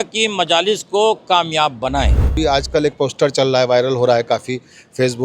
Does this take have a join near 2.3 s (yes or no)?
yes